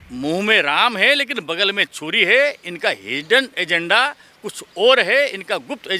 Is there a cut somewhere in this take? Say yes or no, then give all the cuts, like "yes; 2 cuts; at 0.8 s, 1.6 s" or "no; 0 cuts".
no; 0 cuts